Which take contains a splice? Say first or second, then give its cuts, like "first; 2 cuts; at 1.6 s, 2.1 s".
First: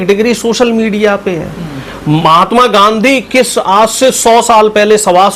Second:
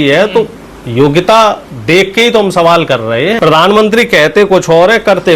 second; 1 cut; at 3.4 s